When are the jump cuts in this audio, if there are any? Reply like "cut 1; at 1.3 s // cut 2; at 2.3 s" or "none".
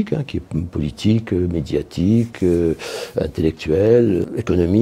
none